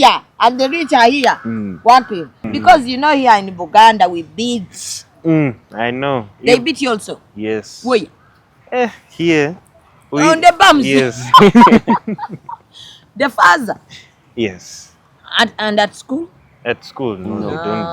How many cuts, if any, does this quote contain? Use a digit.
1